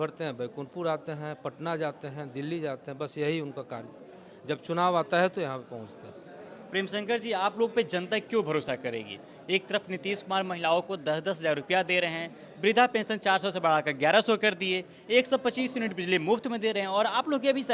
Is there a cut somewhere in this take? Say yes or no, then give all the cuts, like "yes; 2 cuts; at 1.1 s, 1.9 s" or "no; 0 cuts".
no; 0 cuts